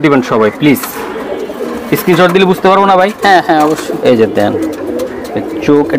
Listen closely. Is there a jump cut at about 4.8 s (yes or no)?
no